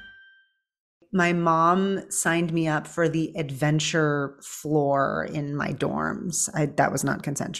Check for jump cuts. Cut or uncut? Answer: cut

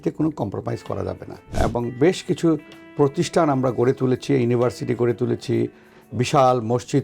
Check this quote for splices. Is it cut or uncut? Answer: cut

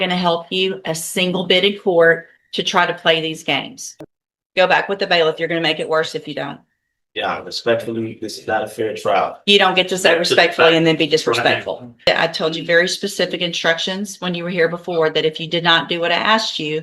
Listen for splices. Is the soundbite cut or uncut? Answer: cut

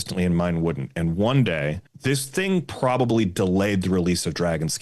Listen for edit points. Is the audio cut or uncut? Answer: cut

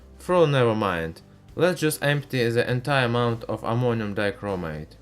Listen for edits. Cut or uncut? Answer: cut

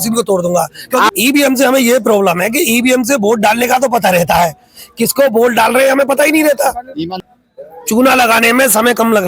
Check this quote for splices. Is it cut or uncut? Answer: cut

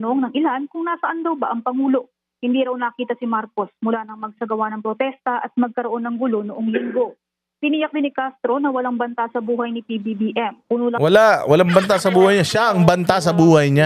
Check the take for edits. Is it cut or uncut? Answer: uncut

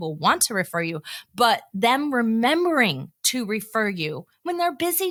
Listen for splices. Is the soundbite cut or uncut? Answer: uncut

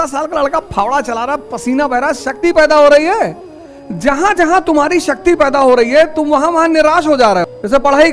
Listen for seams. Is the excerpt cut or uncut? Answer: uncut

